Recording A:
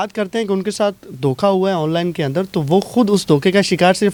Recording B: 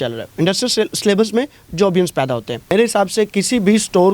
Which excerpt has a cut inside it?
B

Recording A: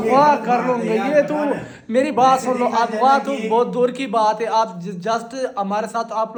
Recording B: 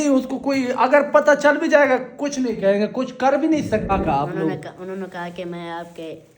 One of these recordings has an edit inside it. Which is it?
B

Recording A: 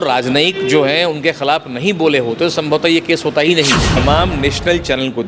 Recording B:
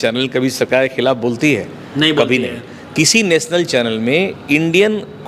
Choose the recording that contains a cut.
A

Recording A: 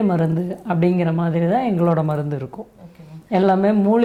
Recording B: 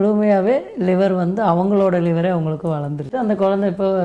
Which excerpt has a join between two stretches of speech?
B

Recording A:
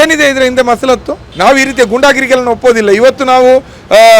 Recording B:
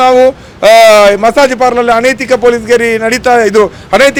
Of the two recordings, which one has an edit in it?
A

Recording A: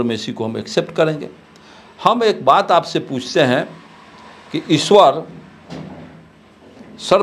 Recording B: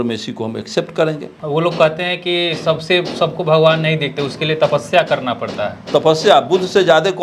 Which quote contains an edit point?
B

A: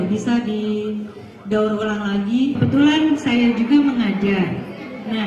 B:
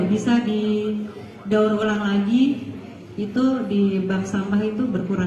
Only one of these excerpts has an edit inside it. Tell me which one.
A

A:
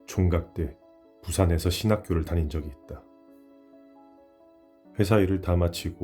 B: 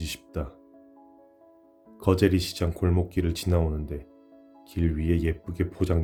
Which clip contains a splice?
A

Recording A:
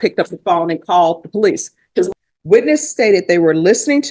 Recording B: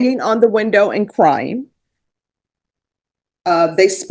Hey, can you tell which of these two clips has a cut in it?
A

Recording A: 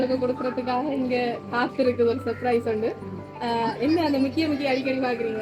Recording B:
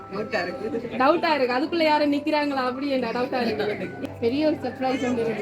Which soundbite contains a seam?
B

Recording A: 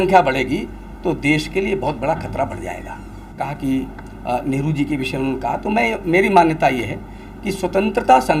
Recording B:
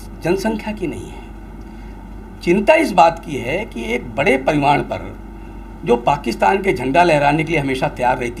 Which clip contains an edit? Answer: A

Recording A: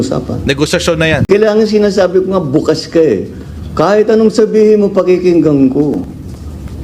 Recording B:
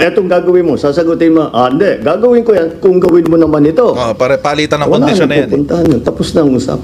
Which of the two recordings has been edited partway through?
A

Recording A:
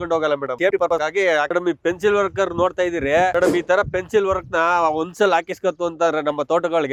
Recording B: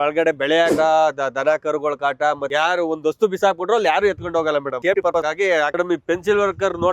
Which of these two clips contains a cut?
B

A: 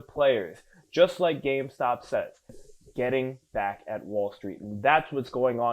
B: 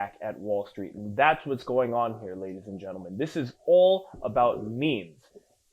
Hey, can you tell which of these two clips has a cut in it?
A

